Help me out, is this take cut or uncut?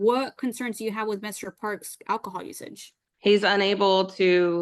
uncut